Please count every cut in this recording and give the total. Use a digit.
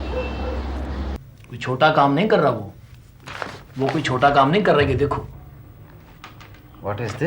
1